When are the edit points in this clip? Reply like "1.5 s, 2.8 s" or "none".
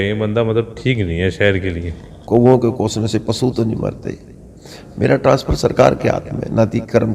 2.2 s